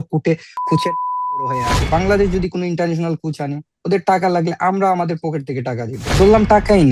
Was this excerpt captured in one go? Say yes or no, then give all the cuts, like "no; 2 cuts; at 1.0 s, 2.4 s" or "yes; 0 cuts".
no; 2 cuts; at 1.7 s, 6.1 s